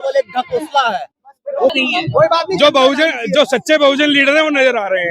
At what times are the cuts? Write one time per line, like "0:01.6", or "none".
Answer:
0:01.7